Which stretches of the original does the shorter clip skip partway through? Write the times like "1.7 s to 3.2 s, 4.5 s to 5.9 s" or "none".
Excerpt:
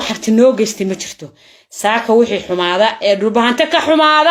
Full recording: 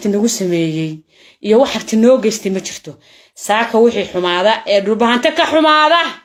none